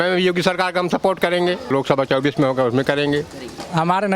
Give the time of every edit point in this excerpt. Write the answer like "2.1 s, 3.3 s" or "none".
none